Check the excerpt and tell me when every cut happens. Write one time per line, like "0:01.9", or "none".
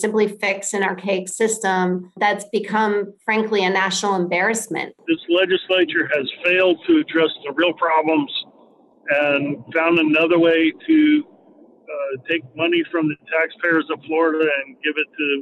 0:02.2
0:05.0